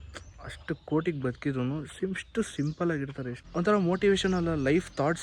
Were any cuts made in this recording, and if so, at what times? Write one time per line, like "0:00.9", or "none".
0:03.4